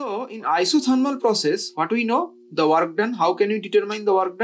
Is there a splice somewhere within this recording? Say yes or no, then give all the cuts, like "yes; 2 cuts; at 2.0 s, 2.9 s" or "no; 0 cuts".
no; 0 cuts